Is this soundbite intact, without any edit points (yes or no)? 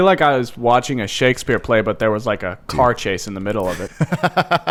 yes